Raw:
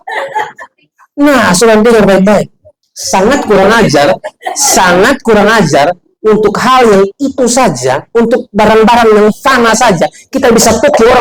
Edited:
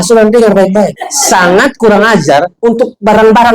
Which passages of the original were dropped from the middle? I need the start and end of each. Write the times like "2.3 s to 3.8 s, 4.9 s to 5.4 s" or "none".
2.6 s to 4.5 s, 6.0 s to 8.1 s